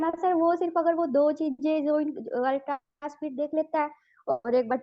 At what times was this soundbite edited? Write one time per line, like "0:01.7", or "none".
none